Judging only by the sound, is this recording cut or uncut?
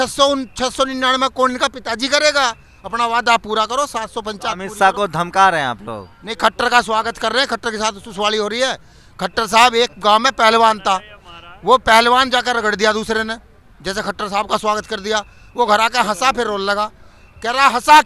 uncut